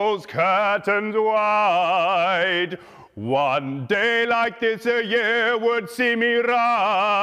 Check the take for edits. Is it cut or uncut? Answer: uncut